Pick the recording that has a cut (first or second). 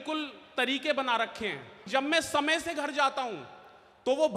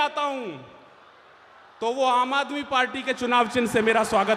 first